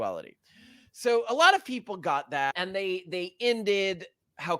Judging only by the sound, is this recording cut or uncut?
cut